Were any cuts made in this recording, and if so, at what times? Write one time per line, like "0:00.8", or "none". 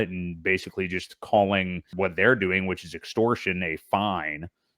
0:01.9